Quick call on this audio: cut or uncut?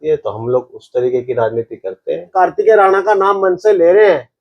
cut